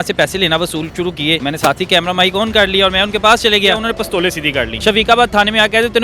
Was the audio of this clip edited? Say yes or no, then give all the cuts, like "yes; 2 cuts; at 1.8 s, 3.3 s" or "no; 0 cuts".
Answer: yes; 2 cuts; at 1.4 s, 4.3 s